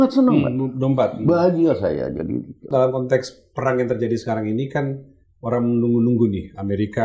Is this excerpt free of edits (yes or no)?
no